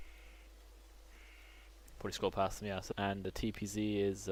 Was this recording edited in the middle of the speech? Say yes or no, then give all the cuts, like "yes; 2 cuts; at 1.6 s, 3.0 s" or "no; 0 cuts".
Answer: no; 0 cuts